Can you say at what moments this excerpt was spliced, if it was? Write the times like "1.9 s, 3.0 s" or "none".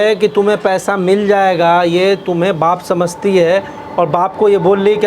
none